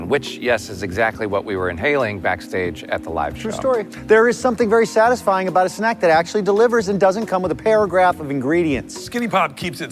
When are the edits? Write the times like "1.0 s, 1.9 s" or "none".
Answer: 3.9 s, 9.0 s